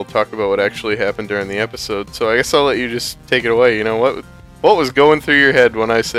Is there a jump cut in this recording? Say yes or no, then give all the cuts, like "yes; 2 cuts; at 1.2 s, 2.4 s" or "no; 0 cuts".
no; 0 cuts